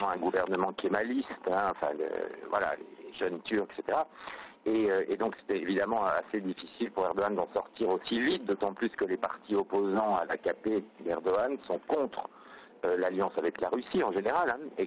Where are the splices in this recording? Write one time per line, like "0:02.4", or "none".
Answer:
none